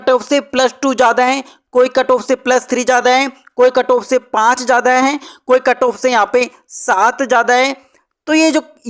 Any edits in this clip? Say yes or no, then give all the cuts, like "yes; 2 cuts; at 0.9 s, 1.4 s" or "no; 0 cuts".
no; 0 cuts